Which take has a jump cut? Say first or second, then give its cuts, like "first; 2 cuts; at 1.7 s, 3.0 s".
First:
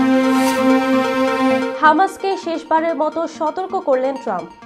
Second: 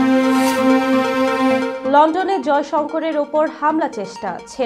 second; 1 cut; at 1.7 s